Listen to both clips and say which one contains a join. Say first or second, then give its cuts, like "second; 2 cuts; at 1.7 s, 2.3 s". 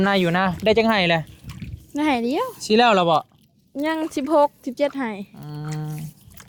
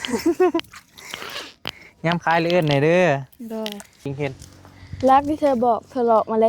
second; 1 cut; at 4.1 s